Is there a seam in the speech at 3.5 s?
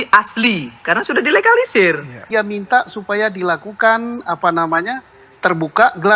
no; 1 cut; at 2.2 s

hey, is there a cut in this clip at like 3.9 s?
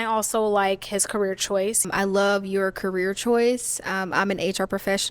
no; 1 cut; at 1.9 s

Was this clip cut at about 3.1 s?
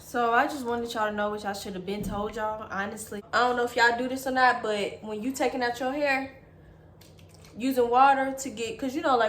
yes; 1 cut; at 3.1 s

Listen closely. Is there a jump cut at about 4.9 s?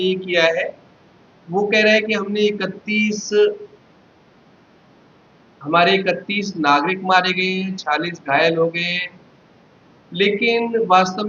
no; 1 cut; at 10.3 s

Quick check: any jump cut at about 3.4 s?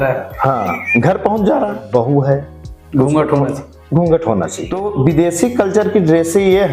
no; 2 cuts; at 1.8 s, 4.9 s

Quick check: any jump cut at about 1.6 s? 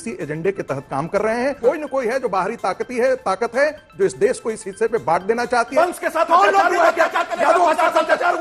yes; 2 cuts; at 1.6 s, 5.7 s

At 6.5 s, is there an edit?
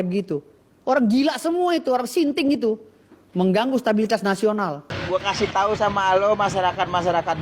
no; 1 cut; at 5.0 s

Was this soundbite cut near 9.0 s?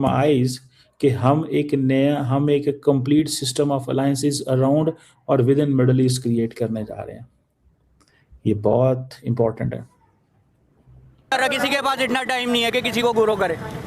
no; 1 cut; at 11.3 s

